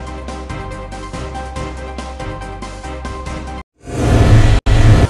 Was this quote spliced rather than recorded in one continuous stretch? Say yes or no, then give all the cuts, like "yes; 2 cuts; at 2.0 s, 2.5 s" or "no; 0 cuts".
yes; 2 cuts; at 1.9 s, 3.5 s